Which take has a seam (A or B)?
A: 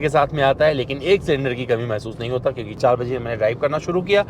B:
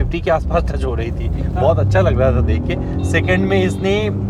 A